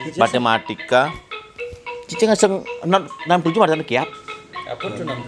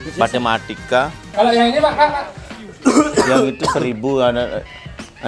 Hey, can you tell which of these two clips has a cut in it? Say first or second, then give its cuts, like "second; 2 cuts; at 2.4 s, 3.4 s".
second; 1 cut; at 1.2 s